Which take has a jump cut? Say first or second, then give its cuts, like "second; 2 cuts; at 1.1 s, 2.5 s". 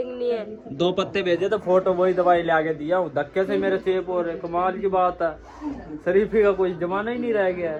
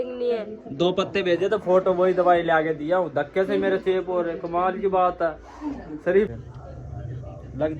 second; 1 cut; at 6.3 s